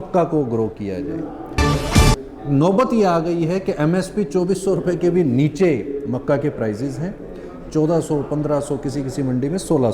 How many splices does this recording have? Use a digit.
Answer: 1